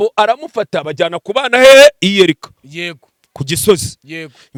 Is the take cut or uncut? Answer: uncut